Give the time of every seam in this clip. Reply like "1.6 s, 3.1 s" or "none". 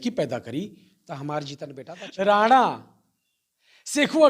1.8 s